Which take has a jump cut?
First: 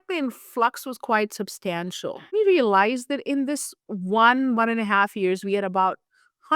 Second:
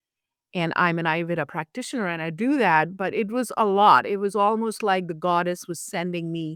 first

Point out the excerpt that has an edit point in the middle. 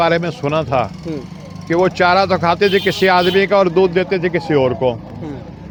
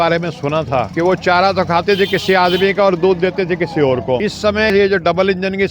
second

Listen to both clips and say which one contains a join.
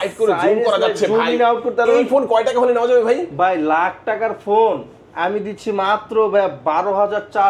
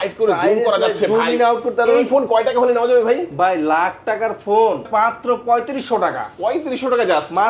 second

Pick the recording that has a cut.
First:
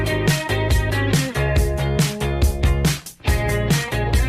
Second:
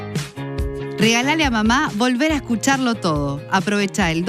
second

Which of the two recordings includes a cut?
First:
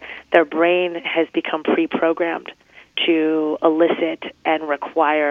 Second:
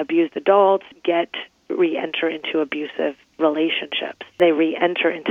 second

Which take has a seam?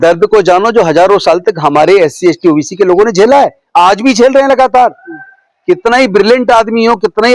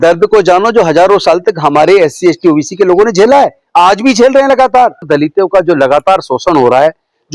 second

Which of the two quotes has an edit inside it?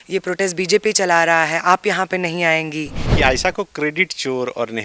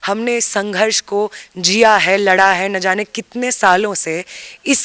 first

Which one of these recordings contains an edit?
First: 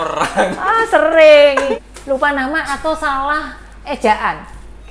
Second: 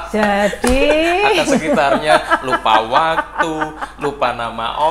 first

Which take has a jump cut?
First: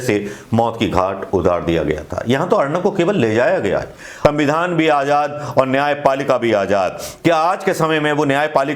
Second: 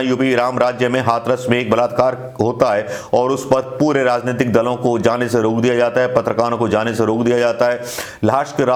first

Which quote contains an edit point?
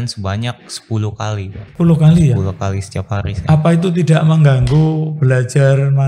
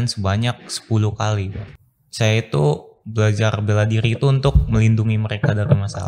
second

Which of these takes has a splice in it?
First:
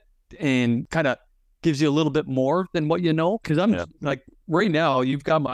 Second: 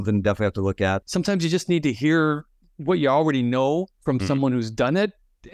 second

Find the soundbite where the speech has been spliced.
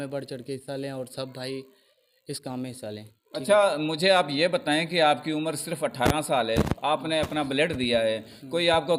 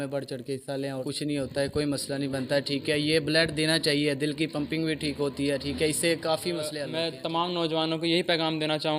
second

